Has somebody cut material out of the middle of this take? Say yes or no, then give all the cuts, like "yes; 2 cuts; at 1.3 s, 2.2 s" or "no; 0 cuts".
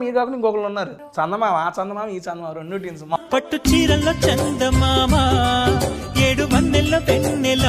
yes; 2 cuts; at 1.0 s, 3.2 s